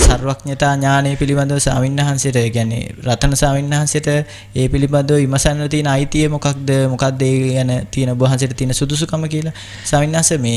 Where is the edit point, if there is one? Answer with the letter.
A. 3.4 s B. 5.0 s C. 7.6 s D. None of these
D